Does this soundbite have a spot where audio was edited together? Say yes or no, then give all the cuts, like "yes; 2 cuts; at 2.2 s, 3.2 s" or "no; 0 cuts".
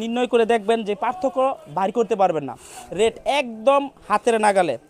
no; 0 cuts